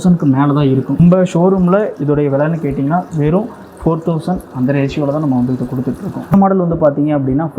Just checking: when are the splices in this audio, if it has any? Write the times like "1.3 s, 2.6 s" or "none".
1.0 s, 6.3 s